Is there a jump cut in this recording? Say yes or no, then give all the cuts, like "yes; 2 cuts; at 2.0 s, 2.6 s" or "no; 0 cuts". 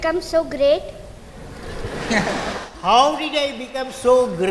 no; 0 cuts